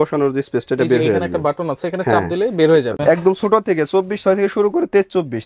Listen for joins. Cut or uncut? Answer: cut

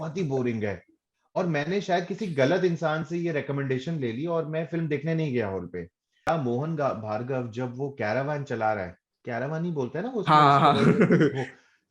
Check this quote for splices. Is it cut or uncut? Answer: cut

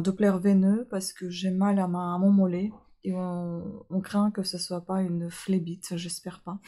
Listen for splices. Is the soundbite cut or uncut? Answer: uncut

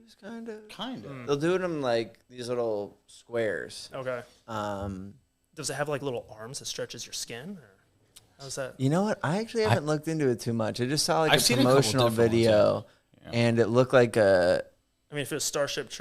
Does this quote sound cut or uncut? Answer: uncut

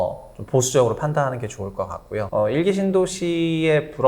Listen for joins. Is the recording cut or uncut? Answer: cut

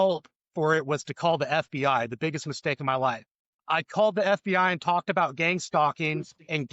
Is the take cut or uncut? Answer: cut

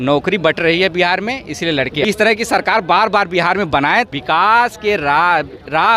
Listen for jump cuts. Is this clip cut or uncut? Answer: cut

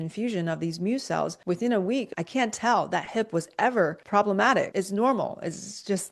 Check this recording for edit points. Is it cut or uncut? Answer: cut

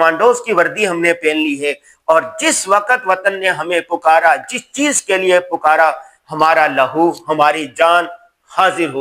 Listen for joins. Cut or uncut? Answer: uncut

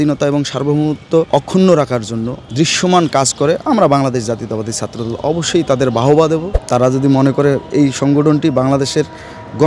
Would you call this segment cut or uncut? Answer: cut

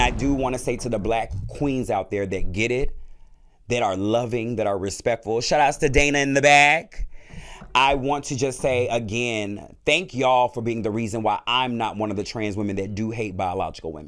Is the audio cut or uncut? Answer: uncut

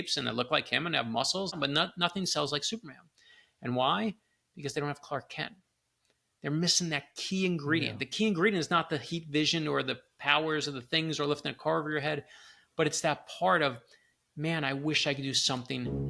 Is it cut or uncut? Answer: cut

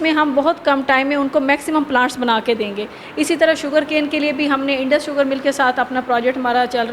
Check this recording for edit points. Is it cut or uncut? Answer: uncut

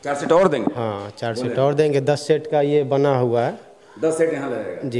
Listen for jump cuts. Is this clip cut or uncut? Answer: uncut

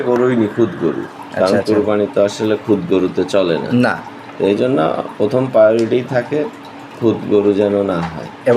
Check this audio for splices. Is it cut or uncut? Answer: uncut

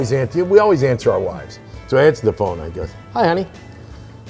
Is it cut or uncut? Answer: uncut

